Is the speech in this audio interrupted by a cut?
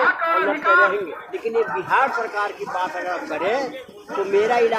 yes; 1 cut; at 1.3 s

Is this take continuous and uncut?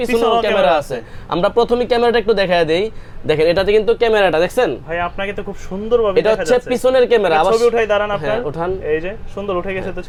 yes; 0 cuts

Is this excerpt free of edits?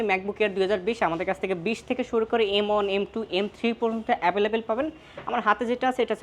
yes; 0 cuts

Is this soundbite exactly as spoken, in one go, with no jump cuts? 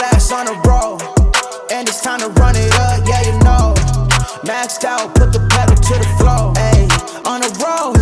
yes; 0 cuts

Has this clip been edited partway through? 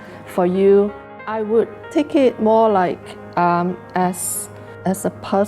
yes; 1 cut; at 1.2 s

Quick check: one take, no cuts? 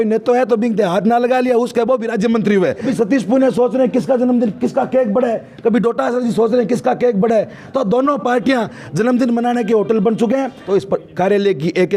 no; 2 cuts; at 2.9 s, 10.6 s

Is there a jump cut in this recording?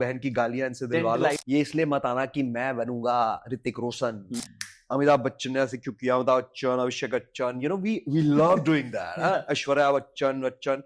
yes; 2 cuts; at 1.4 s, 4.3 s

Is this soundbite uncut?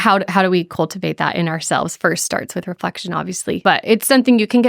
no; 1 cut; at 3.6 s

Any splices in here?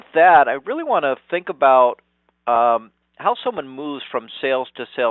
no; 0 cuts

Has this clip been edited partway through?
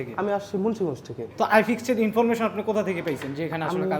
yes; 1 cut; at 1.2 s

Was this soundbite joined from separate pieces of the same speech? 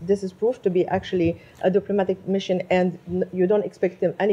no; 0 cuts

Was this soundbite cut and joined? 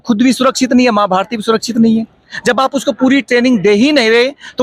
no; 0 cuts

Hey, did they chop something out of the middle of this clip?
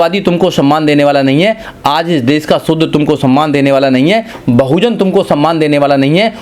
no; 0 cuts

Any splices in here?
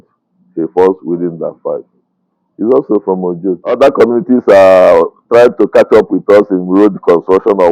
yes; 1 cut; at 3.7 s

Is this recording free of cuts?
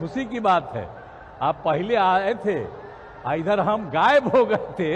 yes; 0 cuts

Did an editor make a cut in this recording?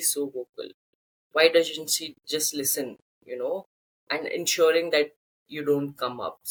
no; 0 cuts

